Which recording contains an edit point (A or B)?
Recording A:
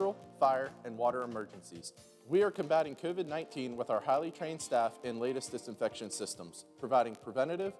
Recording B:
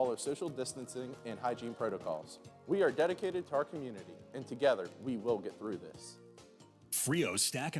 B